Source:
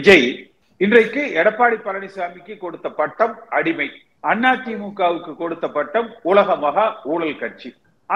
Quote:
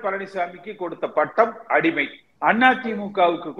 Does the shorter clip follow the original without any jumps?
yes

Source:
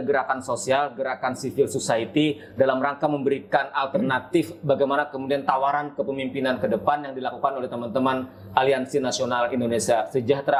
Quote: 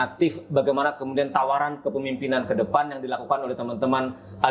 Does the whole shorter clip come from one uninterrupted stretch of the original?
yes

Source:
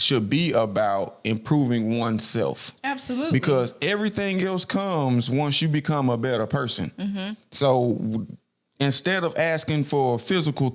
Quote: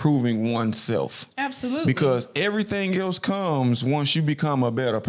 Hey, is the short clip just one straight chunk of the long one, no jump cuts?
yes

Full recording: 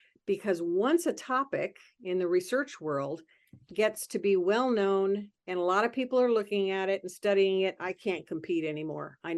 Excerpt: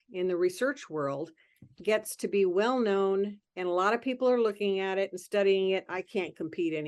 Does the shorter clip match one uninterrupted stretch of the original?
yes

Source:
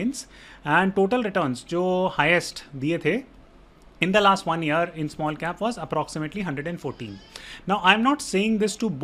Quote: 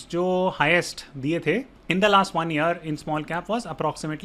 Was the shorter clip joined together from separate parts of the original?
yes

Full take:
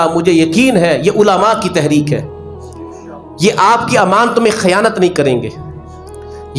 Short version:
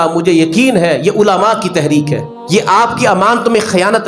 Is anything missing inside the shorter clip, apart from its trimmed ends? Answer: yes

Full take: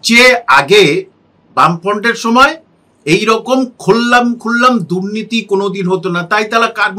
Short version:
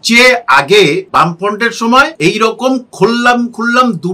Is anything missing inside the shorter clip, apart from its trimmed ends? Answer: yes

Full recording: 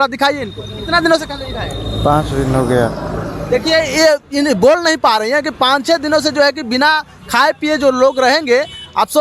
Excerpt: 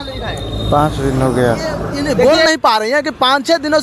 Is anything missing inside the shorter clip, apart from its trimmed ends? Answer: yes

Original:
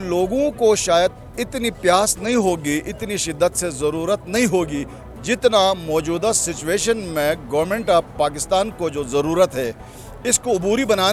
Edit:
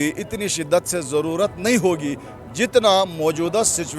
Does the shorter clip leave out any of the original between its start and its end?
no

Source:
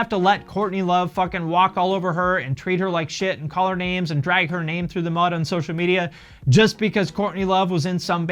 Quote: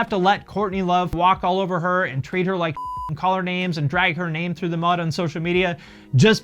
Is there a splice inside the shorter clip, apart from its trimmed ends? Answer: yes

